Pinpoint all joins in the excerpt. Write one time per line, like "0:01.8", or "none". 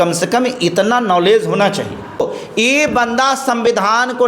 0:02.3